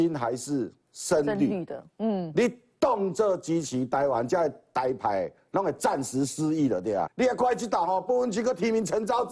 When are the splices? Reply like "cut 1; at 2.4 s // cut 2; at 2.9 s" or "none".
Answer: cut 1; at 7.1 s